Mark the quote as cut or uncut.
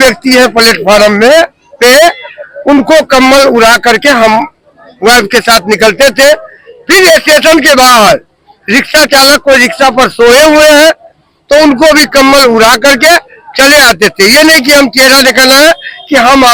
uncut